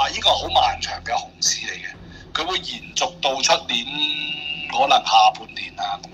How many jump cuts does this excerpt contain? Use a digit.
0